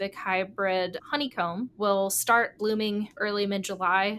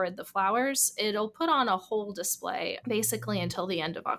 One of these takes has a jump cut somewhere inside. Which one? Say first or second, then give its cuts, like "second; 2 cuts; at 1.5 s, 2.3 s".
first; 1 cut; at 3.2 s